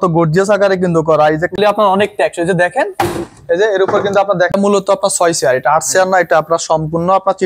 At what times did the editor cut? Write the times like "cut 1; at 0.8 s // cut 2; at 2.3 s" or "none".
cut 1; at 1.5 s // cut 2; at 4.5 s